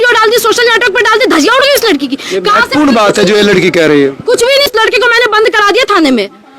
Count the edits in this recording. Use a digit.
1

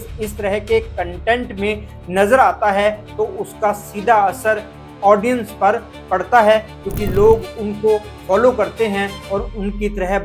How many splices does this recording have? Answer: 0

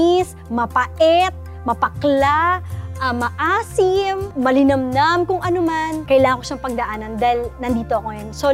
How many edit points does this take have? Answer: 2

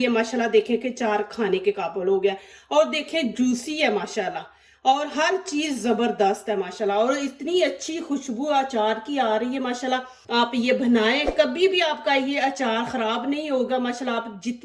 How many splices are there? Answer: 1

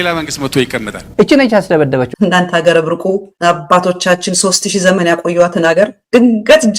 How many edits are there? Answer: 2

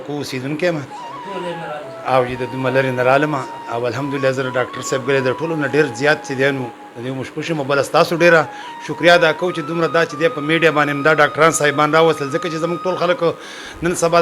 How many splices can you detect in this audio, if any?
0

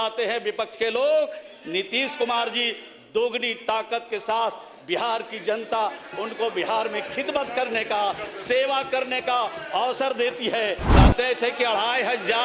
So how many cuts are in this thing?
1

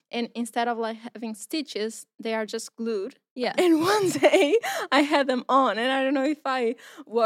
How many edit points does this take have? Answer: 1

